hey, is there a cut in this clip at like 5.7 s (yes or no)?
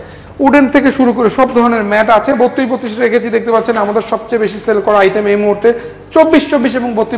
no